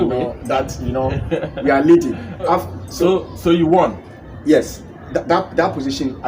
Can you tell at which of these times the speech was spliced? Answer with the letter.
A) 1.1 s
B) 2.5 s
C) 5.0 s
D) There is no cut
B